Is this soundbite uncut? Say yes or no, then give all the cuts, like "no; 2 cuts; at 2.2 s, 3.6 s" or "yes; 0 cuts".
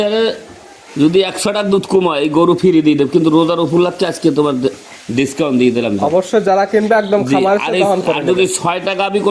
yes; 0 cuts